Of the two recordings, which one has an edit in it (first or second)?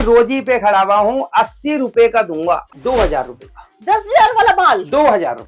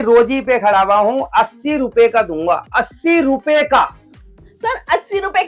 first